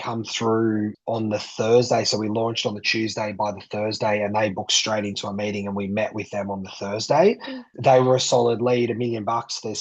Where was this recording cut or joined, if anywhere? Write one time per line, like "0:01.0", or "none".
0:00.9
0:07.7